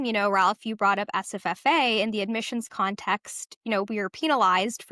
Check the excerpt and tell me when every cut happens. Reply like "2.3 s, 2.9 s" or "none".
none

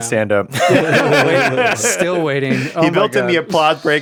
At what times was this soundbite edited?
none

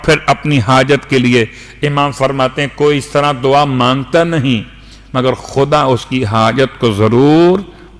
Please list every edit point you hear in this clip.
none

